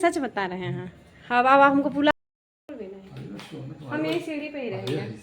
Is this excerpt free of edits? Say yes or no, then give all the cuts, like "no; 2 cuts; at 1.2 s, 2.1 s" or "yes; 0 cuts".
no; 1 cut; at 2.1 s